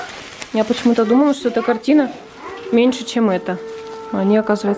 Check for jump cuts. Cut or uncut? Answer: uncut